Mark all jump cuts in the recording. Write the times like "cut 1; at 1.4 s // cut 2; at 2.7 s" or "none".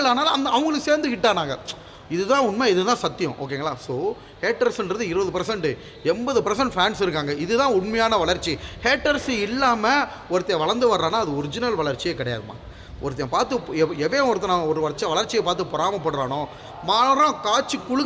none